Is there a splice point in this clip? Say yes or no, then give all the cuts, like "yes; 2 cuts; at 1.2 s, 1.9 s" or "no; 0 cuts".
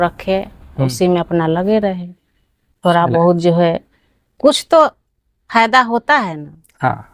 no; 0 cuts